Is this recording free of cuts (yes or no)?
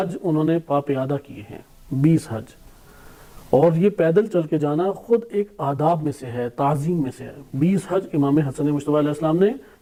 yes